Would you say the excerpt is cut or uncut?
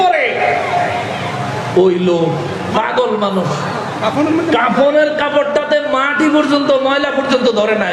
uncut